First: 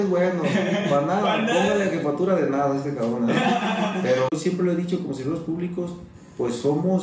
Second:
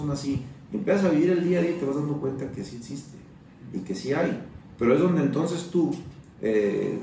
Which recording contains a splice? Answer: first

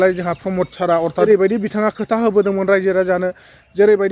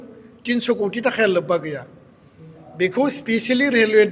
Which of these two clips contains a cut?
first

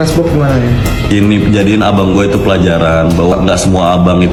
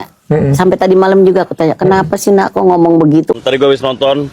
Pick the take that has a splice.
second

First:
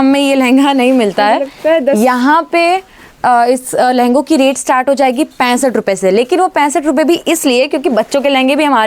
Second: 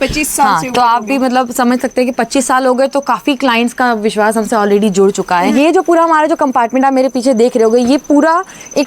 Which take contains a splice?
second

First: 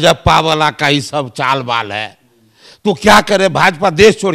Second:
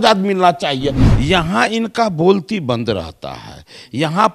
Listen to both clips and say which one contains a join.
second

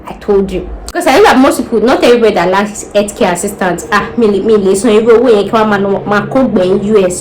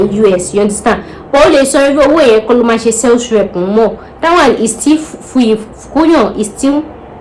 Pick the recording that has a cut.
first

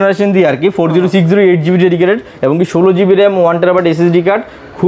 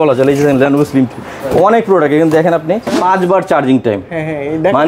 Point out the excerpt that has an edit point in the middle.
second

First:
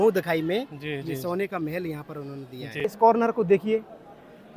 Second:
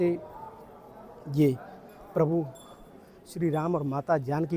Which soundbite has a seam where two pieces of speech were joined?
first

